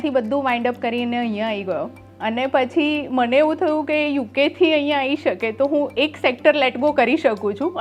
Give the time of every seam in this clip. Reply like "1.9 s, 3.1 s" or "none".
none

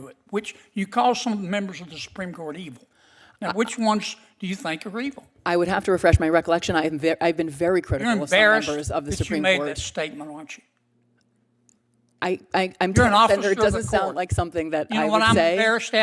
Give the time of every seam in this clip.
none

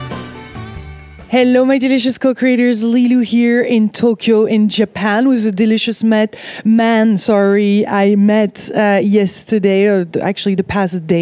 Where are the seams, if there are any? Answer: none

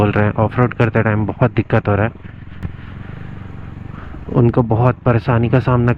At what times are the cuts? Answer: none

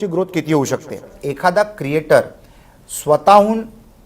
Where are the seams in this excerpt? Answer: 1.2 s

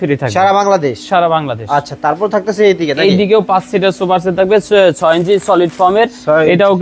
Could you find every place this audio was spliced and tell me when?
none

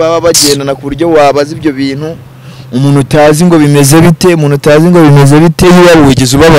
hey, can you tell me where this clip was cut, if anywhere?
5.6 s

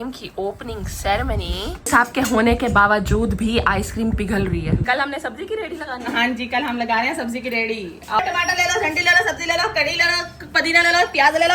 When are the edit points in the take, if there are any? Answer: 1.9 s, 4.8 s, 8.2 s

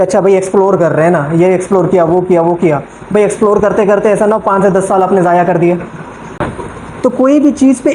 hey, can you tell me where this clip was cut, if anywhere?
6.4 s

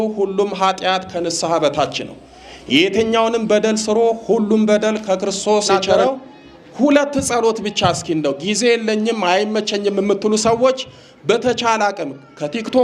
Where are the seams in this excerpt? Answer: 5.9 s

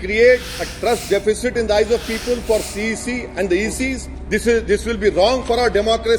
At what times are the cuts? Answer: 4.1 s

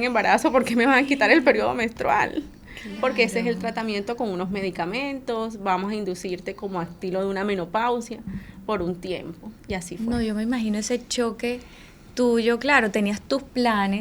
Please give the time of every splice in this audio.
none

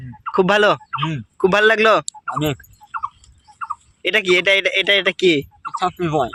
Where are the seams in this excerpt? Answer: none

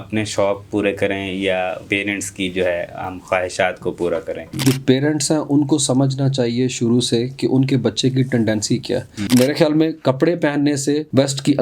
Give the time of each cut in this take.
1.8 s, 4.4 s, 9.2 s

